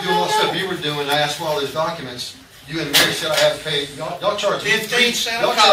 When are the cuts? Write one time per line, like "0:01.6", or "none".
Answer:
none